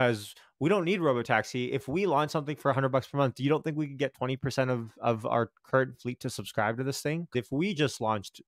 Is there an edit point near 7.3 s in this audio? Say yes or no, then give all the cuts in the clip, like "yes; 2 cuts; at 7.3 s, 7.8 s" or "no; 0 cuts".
yes; 1 cut; at 7.3 s